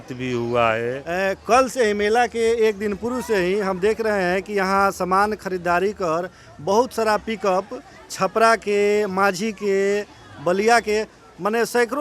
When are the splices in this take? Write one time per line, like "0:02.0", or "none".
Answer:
0:01.2

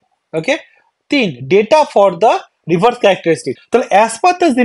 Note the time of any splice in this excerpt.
0:03.5

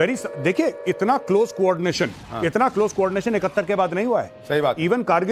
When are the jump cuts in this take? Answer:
none

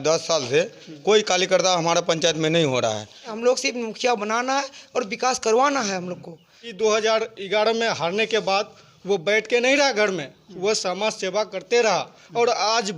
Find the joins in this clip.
0:03.3
0:06.7

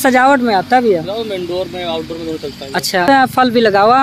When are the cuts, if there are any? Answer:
0:03.0

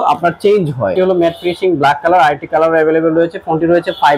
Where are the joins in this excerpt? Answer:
0:00.9

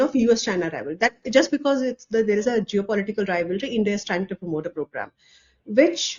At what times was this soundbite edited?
none

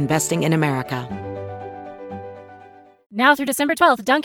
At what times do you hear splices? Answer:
0:03.0

